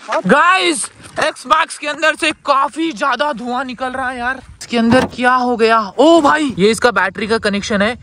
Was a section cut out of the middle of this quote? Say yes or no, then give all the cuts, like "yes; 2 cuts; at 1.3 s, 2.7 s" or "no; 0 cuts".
yes; 2 cuts; at 4.6 s, 6.5 s